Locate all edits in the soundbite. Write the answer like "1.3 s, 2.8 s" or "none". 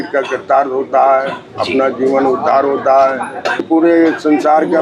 3.7 s